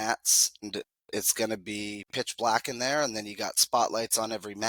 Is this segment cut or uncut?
uncut